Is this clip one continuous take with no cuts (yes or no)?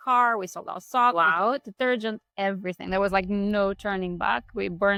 yes